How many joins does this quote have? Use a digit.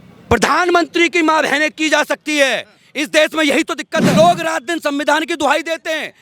1